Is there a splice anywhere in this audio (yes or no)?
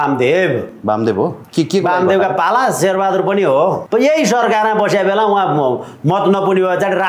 yes